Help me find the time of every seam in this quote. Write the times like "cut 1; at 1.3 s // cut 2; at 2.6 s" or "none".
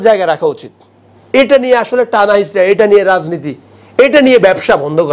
none